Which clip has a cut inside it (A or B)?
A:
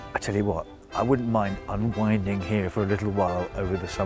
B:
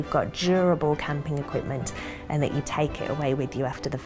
B